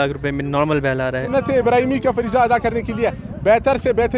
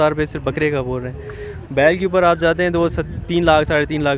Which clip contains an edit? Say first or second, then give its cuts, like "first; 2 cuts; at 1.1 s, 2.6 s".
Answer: first; 1 cut; at 1.2 s